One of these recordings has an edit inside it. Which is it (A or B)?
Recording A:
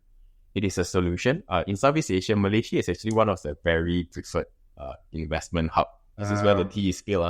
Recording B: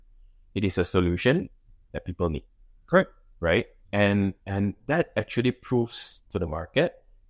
A